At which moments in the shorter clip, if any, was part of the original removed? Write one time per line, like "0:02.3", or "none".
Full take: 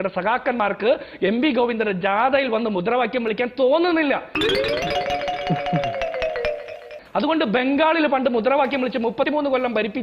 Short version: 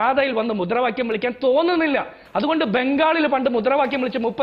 0:02.1